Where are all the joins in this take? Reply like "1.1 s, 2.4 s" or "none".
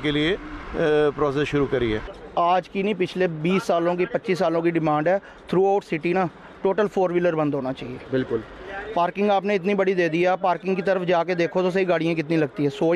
2.1 s